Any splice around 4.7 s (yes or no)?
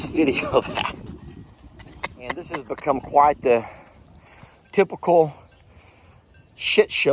no